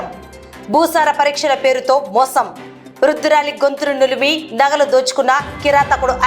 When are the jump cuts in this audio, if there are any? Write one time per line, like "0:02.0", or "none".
none